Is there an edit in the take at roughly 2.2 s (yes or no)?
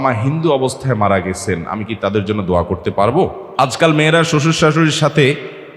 no